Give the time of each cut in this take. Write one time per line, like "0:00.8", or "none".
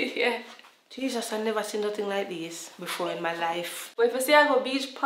0:03.8